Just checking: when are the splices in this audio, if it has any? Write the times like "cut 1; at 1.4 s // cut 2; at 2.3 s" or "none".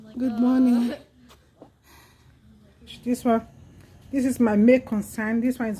cut 1; at 3.0 s